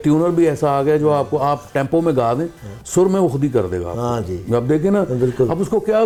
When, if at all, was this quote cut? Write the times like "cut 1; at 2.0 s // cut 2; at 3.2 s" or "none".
none